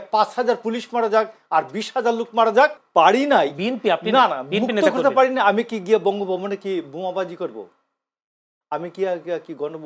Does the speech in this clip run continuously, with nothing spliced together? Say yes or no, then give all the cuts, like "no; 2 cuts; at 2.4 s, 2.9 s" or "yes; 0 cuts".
no; 1 cut; at 2.8 s